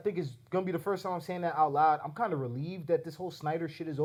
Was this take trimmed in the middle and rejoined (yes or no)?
no